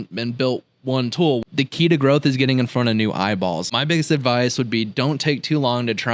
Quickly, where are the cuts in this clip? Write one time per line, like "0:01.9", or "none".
0:01.4
0:03.7